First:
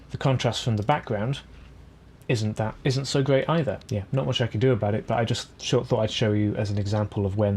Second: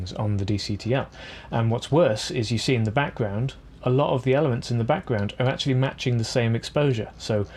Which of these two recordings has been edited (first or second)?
first